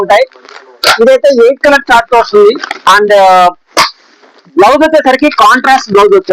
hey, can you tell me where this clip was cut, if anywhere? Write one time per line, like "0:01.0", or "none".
none